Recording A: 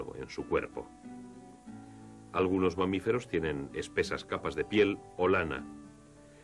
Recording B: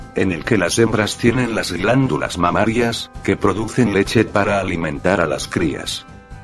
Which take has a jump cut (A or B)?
B